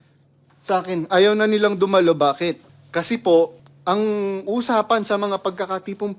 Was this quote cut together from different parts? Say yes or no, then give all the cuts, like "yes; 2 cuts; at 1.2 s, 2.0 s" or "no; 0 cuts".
yes; 2 cuts; at 2.7 s, 3.7 s